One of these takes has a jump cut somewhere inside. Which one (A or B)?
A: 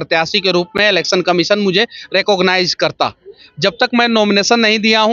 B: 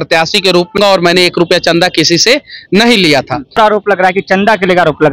B